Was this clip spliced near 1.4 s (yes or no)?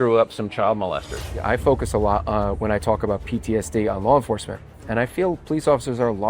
yes